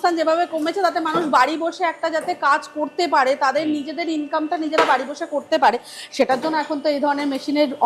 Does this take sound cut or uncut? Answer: uncut